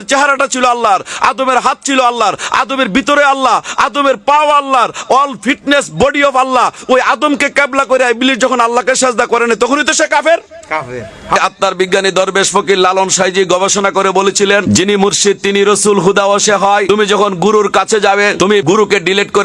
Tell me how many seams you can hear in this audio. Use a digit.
4